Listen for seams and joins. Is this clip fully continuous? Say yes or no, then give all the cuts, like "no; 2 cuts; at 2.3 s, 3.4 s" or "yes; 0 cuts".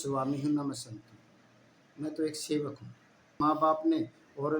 no; 1 cut; at 3.4 s